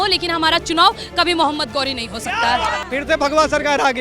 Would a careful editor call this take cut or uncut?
cut